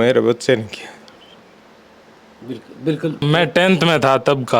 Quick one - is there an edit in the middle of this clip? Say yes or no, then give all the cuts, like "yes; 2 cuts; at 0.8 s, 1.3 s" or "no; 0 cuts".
yes; 1 cut; at 3.2 s